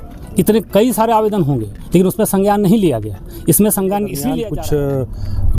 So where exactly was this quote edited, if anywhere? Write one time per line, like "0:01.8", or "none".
0:04.3